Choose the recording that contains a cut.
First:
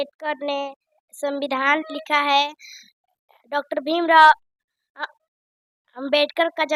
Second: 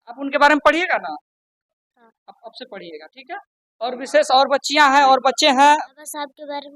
second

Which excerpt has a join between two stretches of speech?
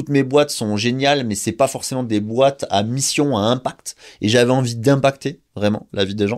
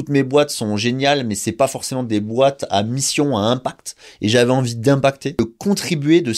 second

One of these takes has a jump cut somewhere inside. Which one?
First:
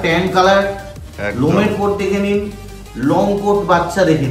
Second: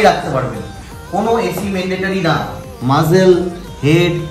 second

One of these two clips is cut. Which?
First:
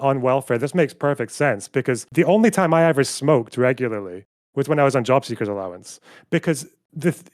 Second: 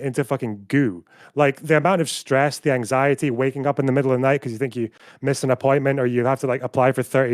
first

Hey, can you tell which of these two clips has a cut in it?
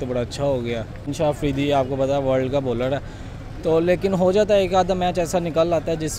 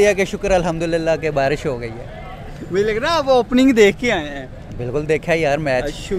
first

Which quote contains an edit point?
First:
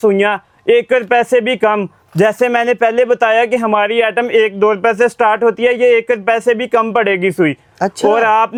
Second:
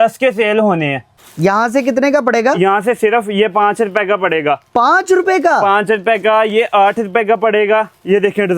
second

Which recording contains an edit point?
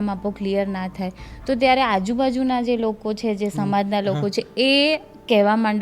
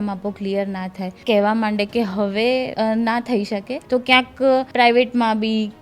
second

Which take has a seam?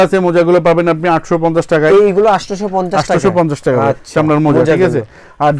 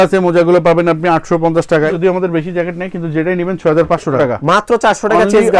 second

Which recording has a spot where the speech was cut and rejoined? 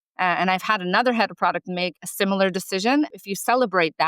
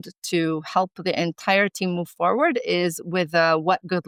first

